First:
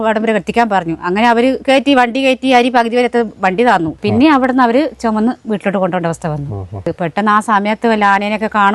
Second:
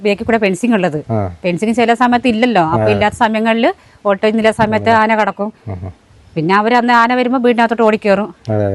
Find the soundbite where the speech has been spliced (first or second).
first